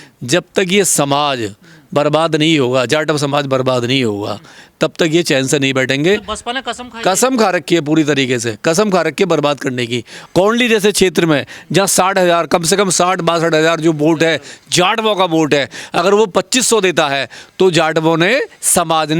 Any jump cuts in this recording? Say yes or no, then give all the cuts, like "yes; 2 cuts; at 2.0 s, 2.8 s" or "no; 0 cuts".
yes; 1 cut; at 10.1 s